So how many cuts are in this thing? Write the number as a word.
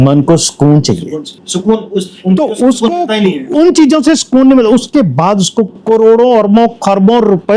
zero